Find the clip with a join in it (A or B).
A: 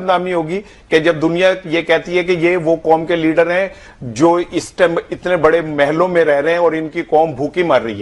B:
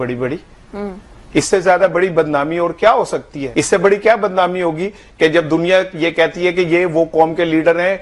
B